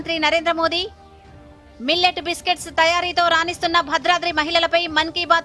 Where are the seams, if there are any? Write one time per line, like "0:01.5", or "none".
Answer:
none